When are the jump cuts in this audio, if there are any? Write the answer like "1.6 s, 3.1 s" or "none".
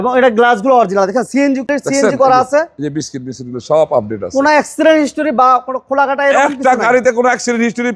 1.6 s